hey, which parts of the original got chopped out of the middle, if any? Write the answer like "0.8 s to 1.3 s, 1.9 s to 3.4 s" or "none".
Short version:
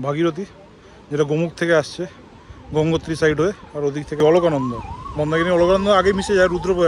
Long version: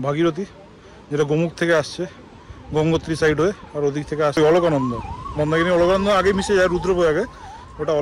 4.2 s to 4.4 s